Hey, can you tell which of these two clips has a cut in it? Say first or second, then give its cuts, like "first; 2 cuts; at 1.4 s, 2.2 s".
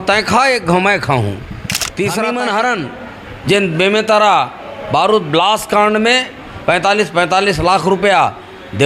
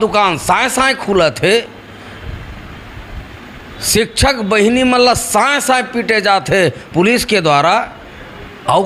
first; 1 cut; at 2.1 s